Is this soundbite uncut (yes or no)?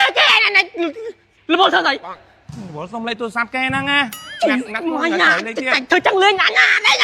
yes